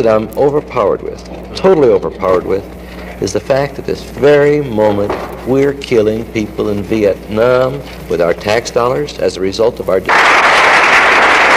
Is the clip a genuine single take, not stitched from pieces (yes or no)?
no